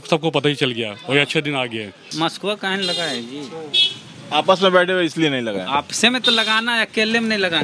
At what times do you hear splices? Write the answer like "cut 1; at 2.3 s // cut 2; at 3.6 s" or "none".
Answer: cut 1; at 2.0 s